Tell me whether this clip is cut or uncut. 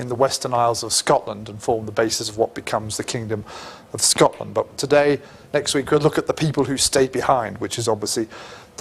cut